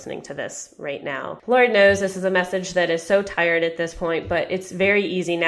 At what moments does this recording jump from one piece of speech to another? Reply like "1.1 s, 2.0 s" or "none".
1.3 s